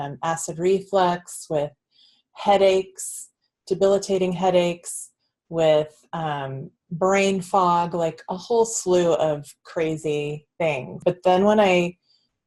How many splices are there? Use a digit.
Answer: 1